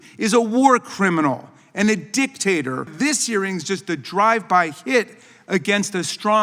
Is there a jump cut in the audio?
yes; 1 cut; at 2.9 s

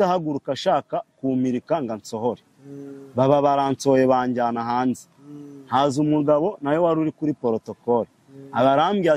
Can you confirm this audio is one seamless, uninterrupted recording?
yes; 0 cuts

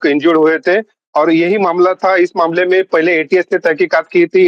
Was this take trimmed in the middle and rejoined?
no; 0 cuts

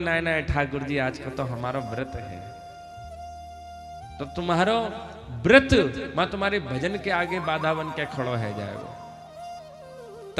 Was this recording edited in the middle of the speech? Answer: no; 0 cuts

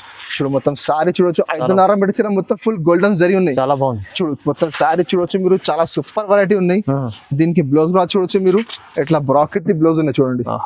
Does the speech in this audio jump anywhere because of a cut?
no; 0 cuts

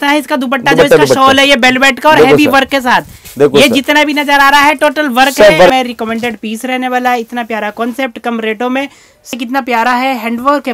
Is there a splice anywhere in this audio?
yes; 2 cuts; at 5.7 s, 9.3 s

